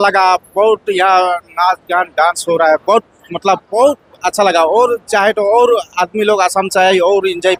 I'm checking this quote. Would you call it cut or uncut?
uncut